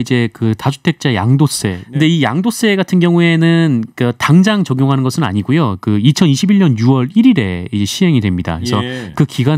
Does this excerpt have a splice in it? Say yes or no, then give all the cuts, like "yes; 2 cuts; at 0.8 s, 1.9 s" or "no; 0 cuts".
yes; 1 cut; at 1.8 s